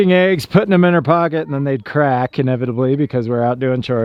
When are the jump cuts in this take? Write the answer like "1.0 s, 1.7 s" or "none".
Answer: none